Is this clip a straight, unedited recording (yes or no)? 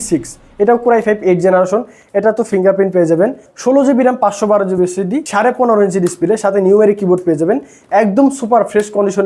yes